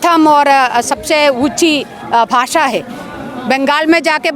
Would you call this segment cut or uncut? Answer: uncut